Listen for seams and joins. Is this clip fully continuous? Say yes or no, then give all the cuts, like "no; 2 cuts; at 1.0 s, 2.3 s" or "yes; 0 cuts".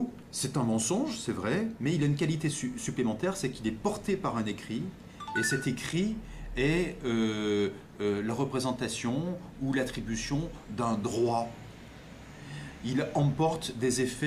no; 1 cut; at 9.4 s